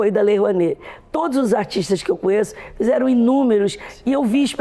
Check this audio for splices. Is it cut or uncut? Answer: uncut